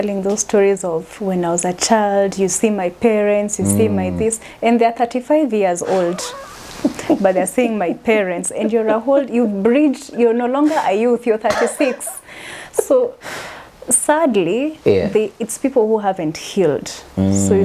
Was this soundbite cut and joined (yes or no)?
no